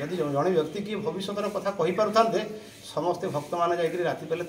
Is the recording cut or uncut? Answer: uncut